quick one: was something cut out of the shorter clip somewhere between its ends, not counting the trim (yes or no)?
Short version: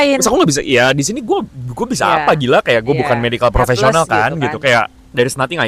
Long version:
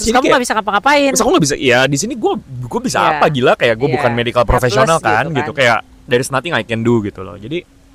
no